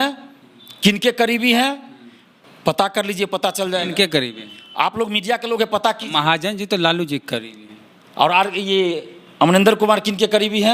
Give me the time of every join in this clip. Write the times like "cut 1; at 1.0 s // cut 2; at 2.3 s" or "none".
none